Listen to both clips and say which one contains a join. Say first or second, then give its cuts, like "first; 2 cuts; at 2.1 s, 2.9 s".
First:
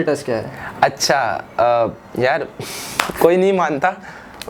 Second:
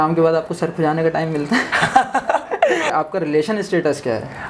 second; 1 cut; at 2.9 s